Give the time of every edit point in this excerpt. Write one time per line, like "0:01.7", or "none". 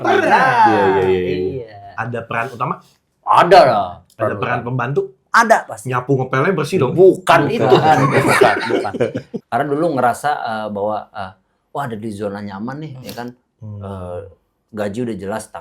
0:09.3

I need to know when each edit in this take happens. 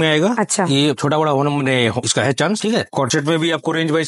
0:02.9

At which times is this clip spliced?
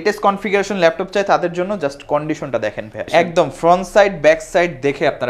0:03.1

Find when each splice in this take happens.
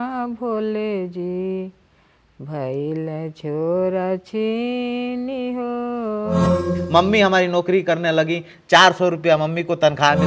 0:06.7

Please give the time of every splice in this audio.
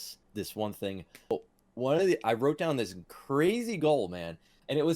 0:01.3

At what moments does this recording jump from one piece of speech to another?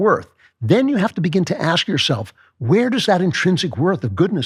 none

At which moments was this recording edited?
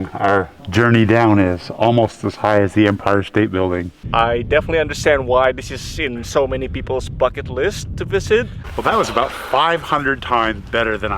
0:04.0
0:08.6

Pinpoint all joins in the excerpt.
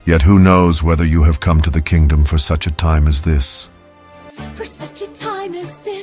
0:04.3

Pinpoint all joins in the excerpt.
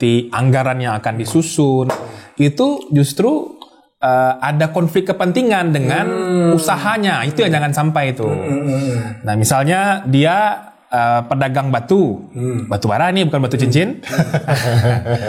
none

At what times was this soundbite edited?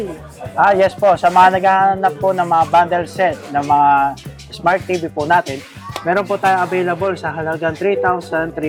none

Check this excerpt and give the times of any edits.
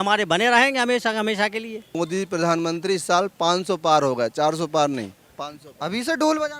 0:01.9

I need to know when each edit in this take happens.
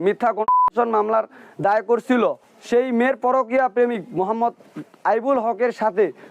0:02.5

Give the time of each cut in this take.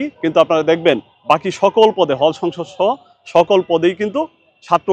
none

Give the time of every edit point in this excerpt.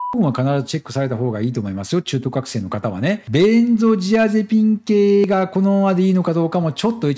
0:03.2

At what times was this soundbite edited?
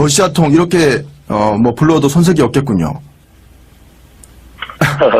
0:01.8

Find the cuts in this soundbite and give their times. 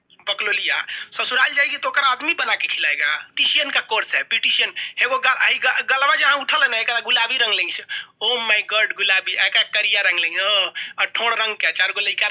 0:03.3

